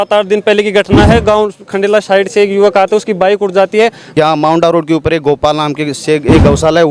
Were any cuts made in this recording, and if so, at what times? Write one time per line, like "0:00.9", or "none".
0:04.1